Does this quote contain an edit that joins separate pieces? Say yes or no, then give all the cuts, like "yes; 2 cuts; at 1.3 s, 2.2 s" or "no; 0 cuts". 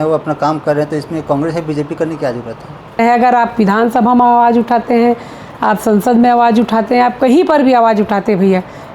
yes; 1 cut; at 3.0 s